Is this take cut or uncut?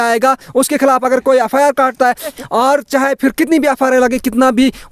cut